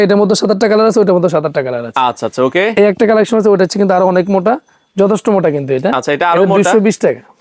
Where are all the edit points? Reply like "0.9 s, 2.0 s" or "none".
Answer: none